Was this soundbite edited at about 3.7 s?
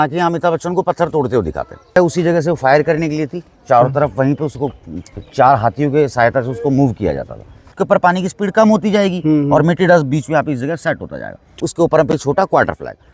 no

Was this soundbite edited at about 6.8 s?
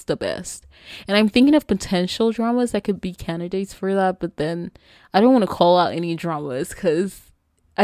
no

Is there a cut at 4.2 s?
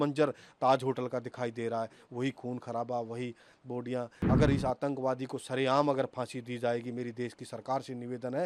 yes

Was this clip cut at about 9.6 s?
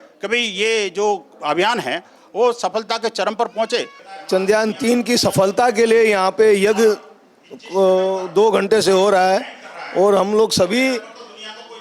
no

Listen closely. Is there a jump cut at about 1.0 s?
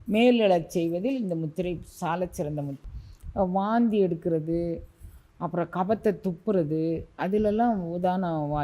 no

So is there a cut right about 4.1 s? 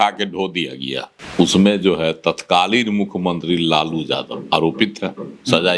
no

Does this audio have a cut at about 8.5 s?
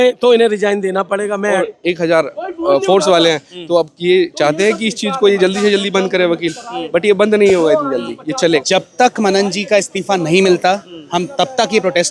yes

